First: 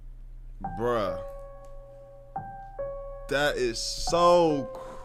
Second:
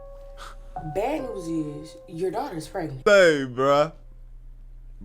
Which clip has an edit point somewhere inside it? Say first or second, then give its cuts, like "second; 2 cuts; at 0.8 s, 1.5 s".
second; 1 cut; at 2.9 s